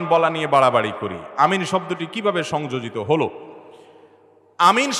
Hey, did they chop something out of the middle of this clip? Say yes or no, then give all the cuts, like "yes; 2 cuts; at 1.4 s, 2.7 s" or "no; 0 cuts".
no; 0 cuts